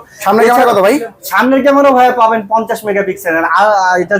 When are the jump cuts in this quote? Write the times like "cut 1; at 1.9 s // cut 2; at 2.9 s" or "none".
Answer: none